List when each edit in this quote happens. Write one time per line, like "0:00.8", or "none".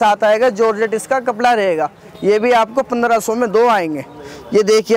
none